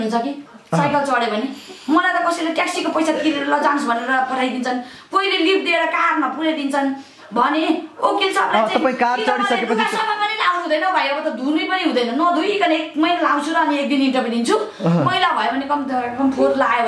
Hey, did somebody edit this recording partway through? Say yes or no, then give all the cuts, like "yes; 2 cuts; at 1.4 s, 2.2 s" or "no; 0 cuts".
no; 0 cuts